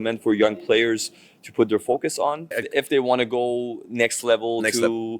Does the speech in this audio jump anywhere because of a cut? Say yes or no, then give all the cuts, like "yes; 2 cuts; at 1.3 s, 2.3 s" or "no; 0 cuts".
yes; 1 cut; at 2.6 s